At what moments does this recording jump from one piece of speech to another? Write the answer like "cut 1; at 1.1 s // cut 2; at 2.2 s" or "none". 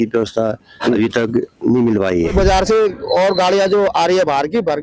cut 1; at 2.3 s